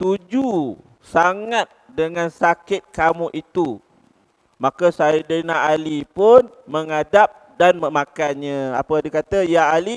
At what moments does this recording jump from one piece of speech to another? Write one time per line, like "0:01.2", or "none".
none